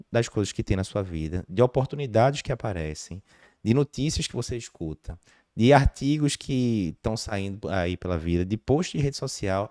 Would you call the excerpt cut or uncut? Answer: uncut